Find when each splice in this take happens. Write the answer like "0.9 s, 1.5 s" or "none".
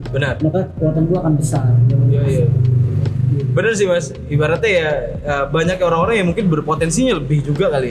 none